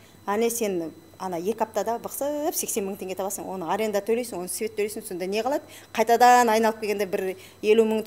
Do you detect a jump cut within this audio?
no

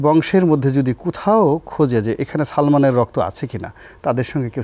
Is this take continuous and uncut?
yes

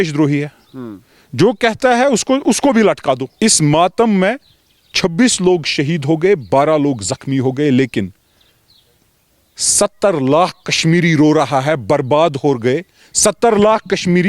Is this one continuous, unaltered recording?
no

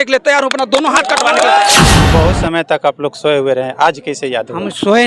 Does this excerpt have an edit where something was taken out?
yes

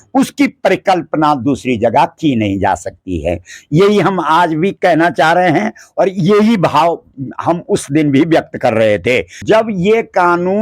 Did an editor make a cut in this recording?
yes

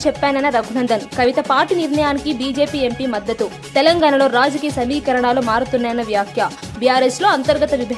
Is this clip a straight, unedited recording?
yes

